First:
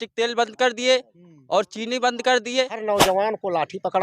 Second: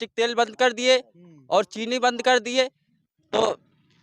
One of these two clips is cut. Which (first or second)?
first